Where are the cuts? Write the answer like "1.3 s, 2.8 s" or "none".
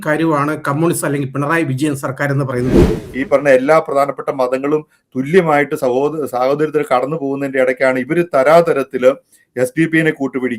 3.0 s